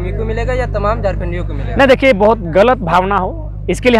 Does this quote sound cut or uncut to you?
uncut